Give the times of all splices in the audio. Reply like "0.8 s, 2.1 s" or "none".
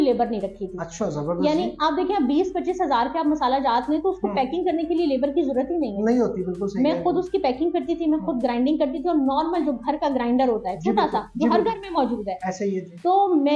none